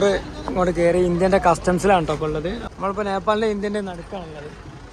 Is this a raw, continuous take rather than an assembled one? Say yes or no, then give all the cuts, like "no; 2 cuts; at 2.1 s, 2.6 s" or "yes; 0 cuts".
no; 1 cut; at 2.6 s